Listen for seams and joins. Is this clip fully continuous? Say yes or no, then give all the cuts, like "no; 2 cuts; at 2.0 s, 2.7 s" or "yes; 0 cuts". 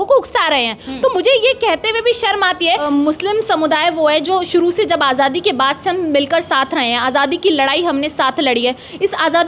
no; 1 cut; at 2.8 s